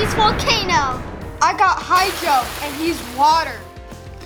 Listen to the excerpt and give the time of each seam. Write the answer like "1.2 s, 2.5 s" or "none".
none